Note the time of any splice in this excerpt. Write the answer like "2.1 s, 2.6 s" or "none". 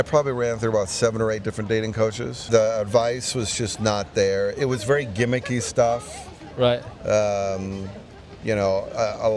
2.4 s